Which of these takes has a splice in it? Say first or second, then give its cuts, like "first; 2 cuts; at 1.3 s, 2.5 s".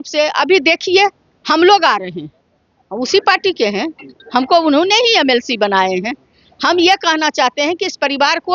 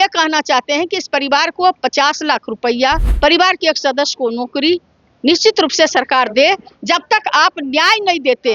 second; 1 cut; at 3.1 s